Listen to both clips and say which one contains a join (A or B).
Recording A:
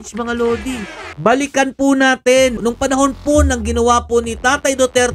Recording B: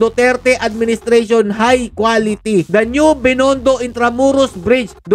A